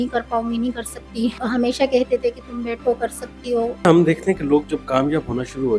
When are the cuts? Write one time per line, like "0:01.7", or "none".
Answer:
0:01.4
0:03.8